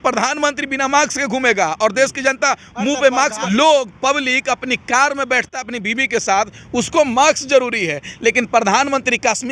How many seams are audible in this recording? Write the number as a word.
one